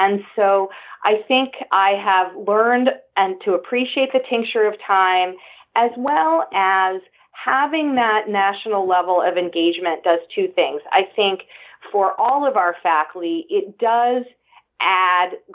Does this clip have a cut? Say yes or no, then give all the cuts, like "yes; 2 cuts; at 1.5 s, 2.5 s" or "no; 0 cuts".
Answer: yes; 1 cut; at 1.6 s